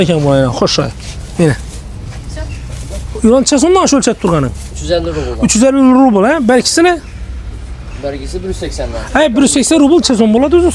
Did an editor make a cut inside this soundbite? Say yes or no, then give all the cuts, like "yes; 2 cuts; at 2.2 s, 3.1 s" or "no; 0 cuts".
no; 0 cuts